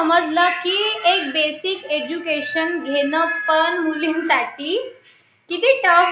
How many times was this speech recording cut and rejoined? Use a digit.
0